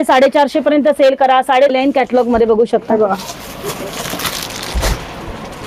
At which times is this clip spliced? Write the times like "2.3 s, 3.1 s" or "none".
1.7 s